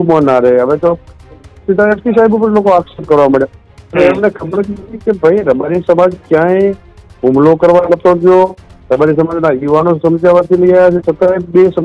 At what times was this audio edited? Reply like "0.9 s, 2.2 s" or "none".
none